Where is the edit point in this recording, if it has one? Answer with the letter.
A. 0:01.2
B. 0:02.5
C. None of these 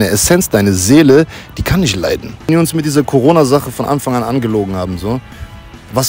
B